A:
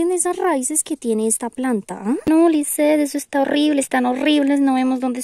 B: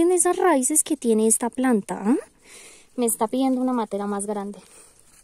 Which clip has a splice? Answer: A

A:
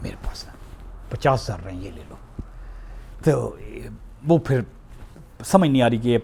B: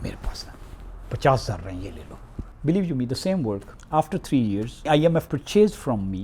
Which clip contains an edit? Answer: B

